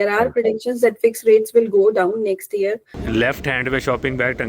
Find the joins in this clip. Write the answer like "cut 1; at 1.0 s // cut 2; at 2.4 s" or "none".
cut 1; at 2.9 s